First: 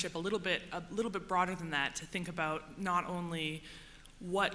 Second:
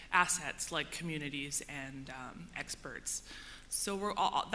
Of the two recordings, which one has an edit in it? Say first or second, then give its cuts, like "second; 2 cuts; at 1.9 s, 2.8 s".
first; 1 cut; at 0.9 s